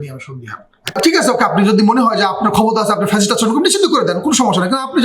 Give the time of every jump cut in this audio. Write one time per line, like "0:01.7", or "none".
0:00.9